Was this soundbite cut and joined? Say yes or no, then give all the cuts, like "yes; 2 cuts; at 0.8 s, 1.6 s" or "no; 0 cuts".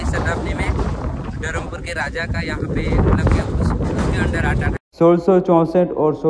yes; 1 cut; at 4.7 s